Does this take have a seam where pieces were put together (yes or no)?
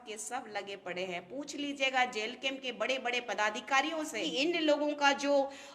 yes